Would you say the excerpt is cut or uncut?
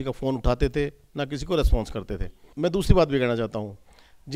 cut